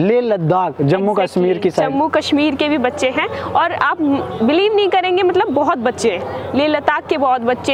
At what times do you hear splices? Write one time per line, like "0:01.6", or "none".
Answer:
none